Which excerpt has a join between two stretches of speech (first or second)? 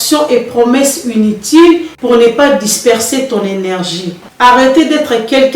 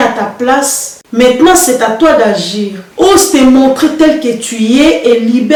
first